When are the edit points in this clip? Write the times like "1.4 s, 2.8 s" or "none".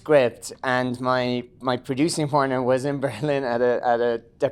none